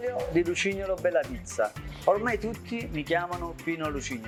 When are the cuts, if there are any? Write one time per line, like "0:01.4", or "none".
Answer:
none

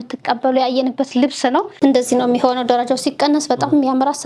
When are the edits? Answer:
0:01.7

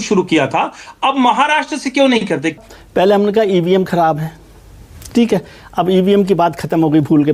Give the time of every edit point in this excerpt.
0:02.5

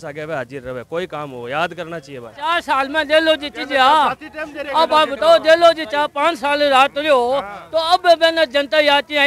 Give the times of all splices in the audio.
0:02.5

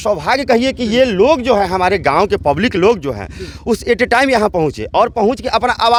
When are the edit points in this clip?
none

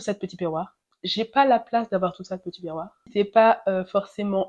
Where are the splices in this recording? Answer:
0:03.1

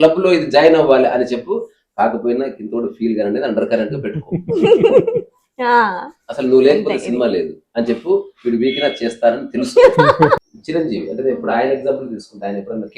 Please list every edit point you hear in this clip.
0:10.4

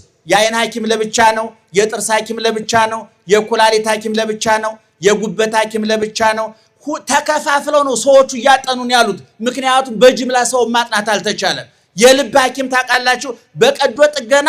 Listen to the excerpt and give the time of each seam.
none

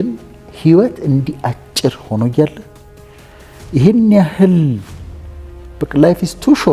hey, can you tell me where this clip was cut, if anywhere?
none

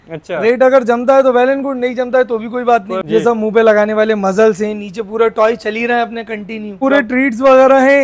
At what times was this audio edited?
0:03.0
0:06.8

